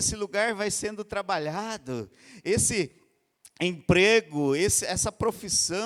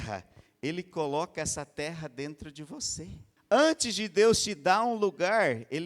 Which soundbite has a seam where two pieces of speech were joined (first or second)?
second